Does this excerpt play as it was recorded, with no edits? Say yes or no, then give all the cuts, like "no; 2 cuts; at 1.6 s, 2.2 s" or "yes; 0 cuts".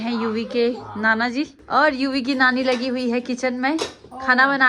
no; 1 cut; at 1.6 s